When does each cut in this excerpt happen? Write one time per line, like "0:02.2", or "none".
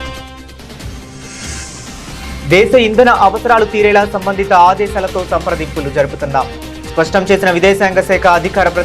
0:01.5

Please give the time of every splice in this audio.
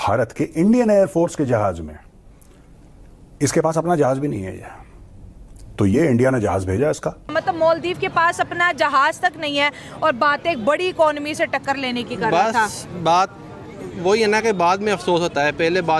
0:07.3

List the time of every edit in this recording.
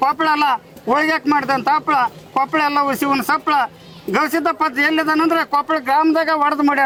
none

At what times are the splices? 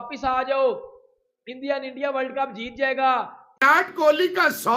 none

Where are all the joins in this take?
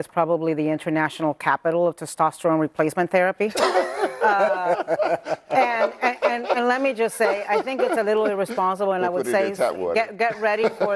none

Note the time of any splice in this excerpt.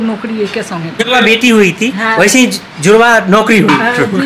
0:01.1

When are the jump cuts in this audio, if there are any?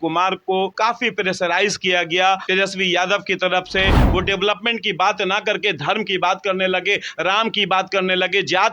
0:00.7
0:02.5
0:04.0

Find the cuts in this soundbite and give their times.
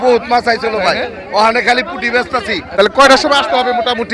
0:02.6

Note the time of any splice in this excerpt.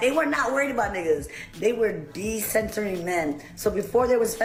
none

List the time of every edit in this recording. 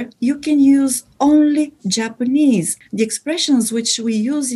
0:02.8

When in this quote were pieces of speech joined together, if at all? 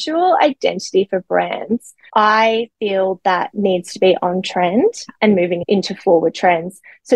none

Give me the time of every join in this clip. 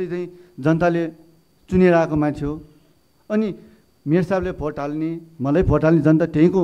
none

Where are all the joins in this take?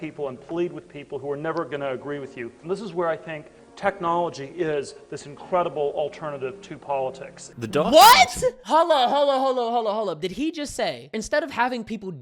0:08.6
0:11.2

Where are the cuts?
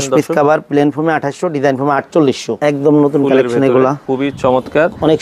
0:02.5
0:04.0

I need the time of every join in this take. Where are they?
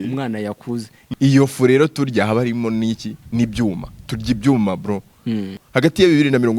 0:00.9
0:05.5

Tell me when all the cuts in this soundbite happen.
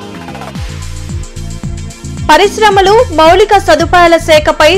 0:01.5

